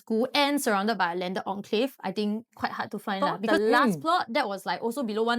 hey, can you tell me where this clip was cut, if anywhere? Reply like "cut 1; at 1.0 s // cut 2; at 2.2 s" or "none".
cut 1; at 3.2 s